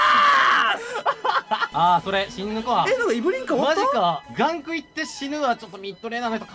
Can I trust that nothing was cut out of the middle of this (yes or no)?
no